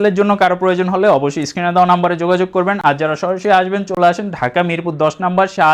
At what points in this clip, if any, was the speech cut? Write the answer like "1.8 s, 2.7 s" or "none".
none